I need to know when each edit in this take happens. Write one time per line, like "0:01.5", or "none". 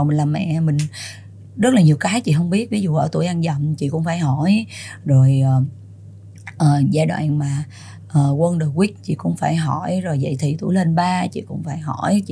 none